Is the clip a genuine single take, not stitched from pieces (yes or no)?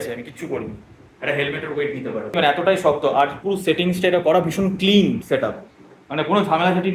yes